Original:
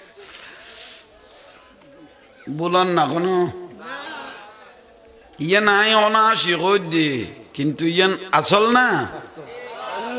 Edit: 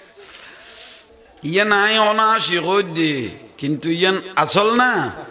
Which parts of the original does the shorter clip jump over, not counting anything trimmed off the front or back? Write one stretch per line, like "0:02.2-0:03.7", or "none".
0:01.1-0:05.0

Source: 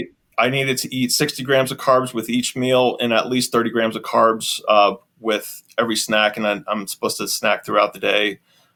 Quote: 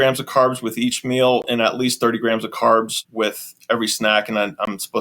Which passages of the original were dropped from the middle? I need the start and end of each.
0:04.5-0:05.1

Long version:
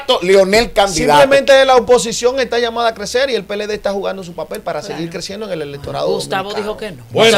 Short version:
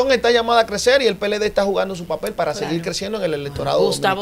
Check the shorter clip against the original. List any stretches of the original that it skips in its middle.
none

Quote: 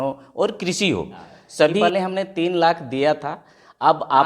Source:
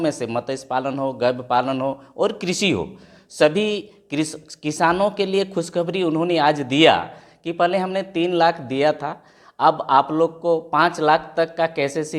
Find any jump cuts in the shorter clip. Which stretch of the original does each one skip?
0:03.6-0:07.6

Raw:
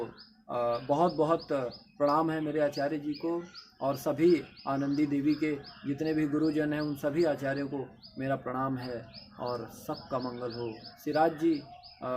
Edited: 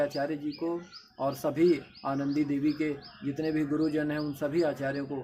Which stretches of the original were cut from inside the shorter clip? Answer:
none

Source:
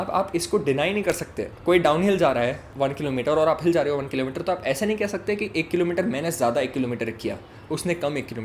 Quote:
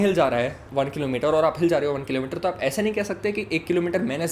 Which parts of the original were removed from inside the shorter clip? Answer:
none

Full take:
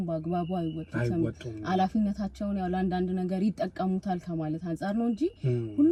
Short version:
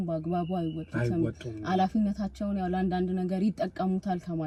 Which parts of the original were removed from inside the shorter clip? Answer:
none

